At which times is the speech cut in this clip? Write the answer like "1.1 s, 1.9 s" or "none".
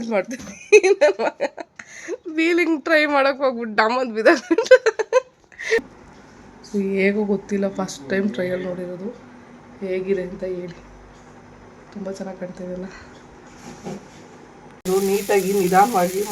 5.8 s, 14.9 s